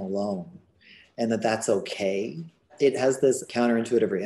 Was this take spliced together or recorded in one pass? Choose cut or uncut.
cut